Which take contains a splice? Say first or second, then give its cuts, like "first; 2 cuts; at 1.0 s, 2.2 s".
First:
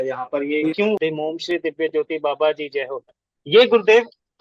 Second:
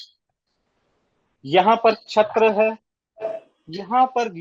first; 1 cut; at 1.0 s